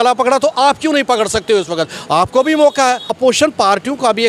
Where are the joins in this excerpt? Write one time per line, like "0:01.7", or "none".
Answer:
0:03.1